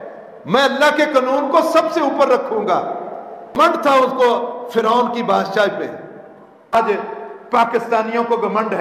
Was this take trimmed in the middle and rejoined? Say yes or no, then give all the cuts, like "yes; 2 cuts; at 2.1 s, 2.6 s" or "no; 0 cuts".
yes; 2 cuts; at 3.7 s, 6.7 s